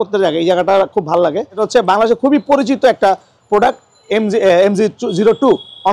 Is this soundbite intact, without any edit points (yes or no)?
no